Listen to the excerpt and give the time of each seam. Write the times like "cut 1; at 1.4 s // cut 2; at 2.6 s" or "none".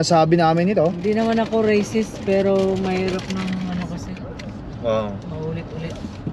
none